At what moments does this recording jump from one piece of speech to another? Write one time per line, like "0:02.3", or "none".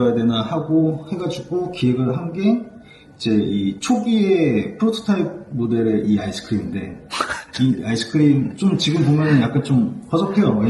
none